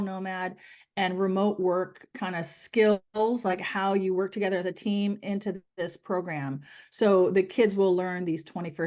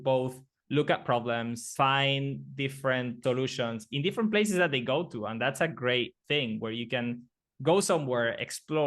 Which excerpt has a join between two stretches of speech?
second; 2 cuts; at 1.7 s, 3.2 s

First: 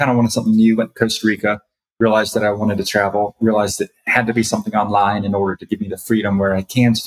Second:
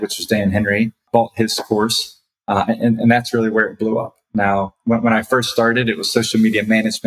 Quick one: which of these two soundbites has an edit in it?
second; 1 cut; at 1.0 s

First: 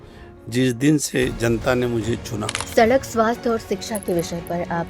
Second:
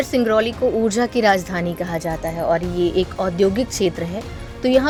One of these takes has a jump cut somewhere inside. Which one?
first; 1 cut; at 2.5 s

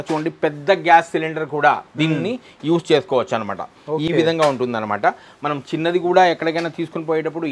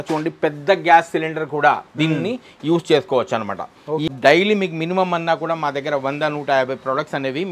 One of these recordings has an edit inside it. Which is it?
second; 1 cut; at 4.1 s

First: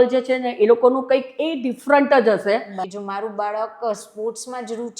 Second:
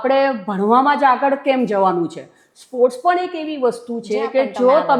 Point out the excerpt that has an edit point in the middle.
first; 1 cut; at 2.8 s

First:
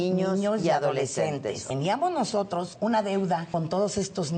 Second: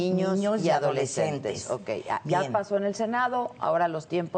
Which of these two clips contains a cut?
first; 3 cuts; at 1.6 s, 2.7 s, 3.5 s

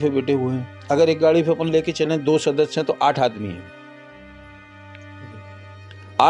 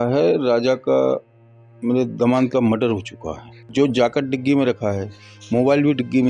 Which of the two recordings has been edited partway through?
second; 1 cut; at 3.6 s

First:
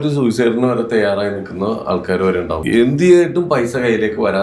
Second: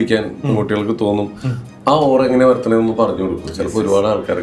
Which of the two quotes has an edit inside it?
first; 1 cut; at 2.6 s

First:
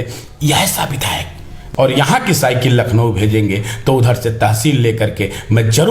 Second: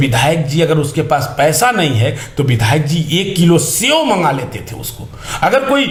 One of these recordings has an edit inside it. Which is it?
first; 1 cut; at 1.6 s

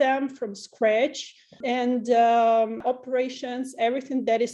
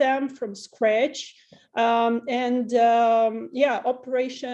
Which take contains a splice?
first; 2 cuts; at 1.6 s, 2.8 s

